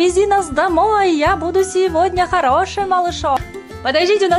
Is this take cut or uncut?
cut